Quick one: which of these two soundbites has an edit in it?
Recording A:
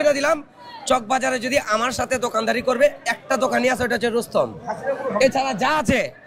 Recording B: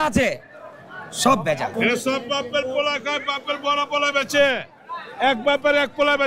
B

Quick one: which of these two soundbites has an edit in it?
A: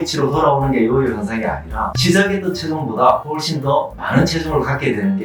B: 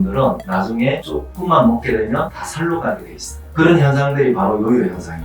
B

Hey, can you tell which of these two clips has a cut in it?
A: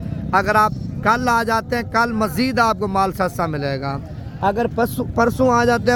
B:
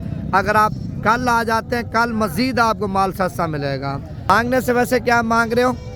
B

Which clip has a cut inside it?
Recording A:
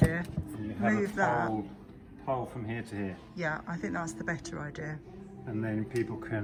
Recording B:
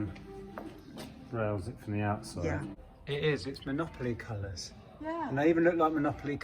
B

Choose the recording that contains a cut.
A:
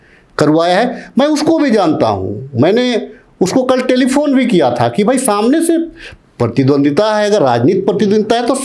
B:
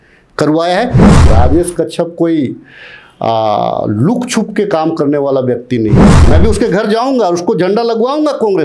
B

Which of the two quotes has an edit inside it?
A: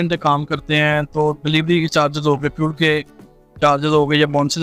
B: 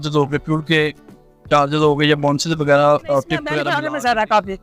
B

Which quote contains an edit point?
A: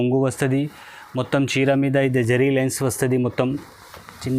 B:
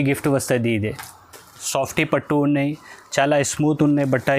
B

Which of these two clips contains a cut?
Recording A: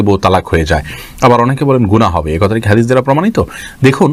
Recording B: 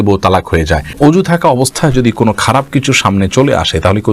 B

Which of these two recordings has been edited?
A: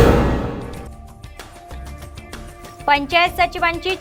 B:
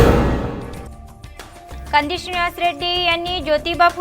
B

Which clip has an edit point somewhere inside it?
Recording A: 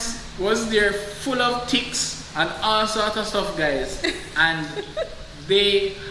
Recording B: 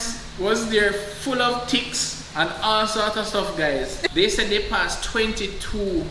B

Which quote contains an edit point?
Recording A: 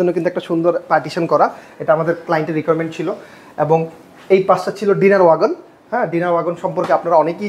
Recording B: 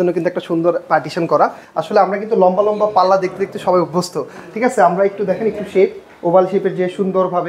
B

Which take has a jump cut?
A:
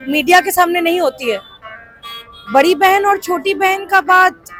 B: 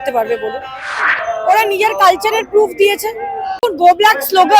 B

